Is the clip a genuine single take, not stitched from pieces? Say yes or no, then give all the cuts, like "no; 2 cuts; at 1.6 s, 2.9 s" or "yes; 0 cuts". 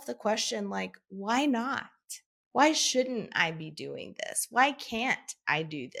yes; 0 cuts